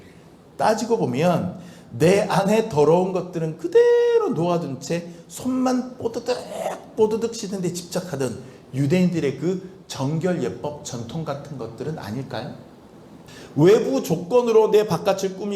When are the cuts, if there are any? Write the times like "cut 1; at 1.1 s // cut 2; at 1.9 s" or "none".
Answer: cut 1; at 13.3 s